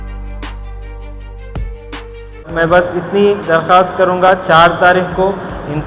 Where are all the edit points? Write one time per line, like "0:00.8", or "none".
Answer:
0:00.9
0:02.5